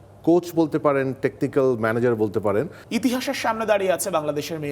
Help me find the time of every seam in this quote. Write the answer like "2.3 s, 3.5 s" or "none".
2.8 s